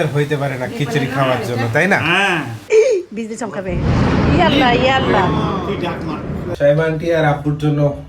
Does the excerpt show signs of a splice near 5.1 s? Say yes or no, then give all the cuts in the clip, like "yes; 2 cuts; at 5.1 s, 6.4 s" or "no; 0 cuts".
no; 2 cuts; at 2.6 s, 6.5 s